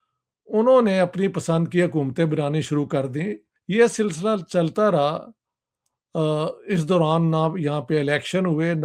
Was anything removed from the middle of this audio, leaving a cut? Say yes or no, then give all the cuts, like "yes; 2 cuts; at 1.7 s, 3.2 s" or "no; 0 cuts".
yes; 1 cut; at 3.5 s